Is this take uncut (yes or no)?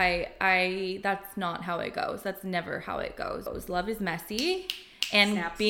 no